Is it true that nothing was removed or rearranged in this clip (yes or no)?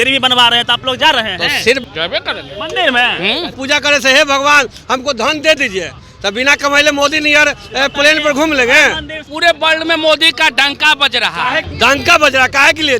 no